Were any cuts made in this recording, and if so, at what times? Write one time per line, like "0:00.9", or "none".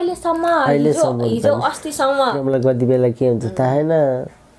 0:02.4